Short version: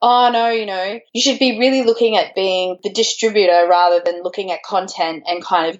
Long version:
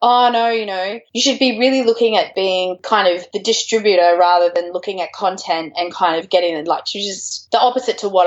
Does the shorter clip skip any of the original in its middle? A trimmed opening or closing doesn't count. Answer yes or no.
yes